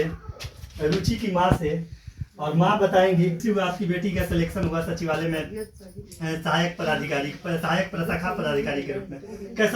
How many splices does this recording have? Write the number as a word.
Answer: zero